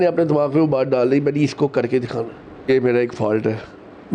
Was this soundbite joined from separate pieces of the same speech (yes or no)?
yes